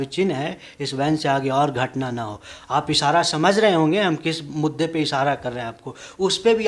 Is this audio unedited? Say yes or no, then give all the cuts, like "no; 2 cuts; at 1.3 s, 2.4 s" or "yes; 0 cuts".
yes; 0 cuts